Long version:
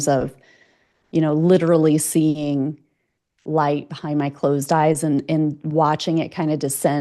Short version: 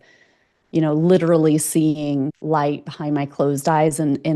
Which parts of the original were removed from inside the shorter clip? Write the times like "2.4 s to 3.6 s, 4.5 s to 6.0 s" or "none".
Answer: 2.8 s to 3.4 s